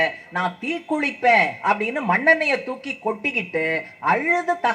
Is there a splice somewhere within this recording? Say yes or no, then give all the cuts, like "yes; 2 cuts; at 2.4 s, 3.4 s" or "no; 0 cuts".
no; 0 cuts